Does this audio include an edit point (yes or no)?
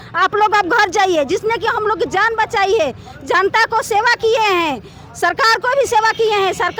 no